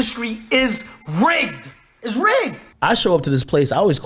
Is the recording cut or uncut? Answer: cut